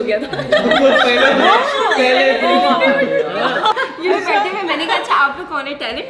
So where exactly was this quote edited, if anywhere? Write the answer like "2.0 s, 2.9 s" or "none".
3.8 s